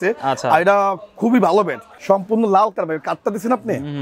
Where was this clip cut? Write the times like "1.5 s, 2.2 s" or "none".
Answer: 1.9 s